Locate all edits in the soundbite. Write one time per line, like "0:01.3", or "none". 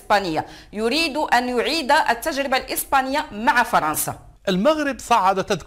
0:04.3